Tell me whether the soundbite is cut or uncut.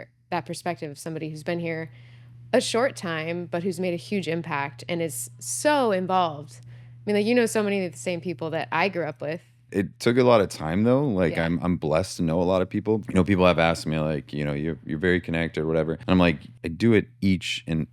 cut